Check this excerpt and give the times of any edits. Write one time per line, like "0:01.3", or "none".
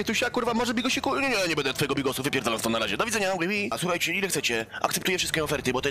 0:03.8